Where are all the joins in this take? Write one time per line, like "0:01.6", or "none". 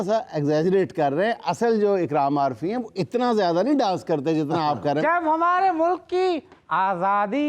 0:05.0